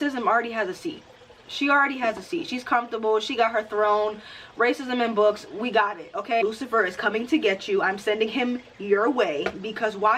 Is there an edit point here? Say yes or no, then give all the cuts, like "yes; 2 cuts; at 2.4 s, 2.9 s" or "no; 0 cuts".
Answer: yes; 1 cut; at 6.4 s